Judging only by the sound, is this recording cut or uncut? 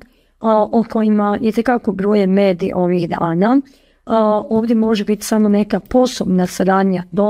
uncut